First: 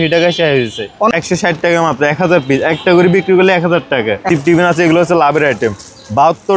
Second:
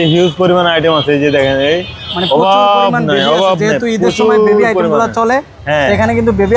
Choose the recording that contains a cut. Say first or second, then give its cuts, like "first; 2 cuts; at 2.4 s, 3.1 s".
first; 2 cuts; at 1.1 s, 4.3 s